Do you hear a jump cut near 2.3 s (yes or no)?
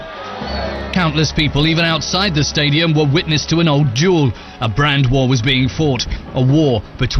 yes